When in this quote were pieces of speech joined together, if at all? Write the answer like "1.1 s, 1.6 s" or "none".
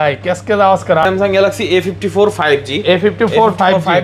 1.0 s